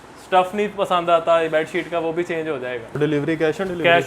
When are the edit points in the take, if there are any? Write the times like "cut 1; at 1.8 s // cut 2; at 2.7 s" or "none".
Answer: cut 1; at 2.9 s

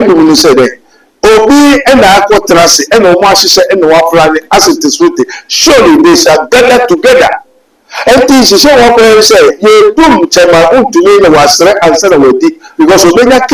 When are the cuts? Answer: none

